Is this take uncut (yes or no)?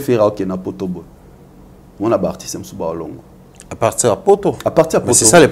yes